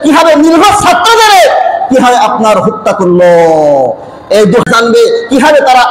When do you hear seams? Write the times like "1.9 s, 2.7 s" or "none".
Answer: 4.6 s